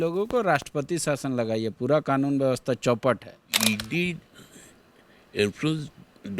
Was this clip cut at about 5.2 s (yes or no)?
no